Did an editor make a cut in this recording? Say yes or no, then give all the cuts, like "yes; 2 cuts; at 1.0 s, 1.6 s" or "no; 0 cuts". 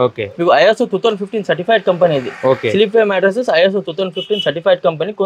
no; 0 cuts